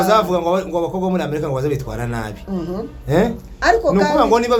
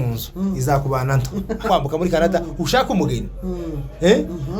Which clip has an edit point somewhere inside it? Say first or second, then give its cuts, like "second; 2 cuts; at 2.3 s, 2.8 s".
second; 1 cut; at 1.7 s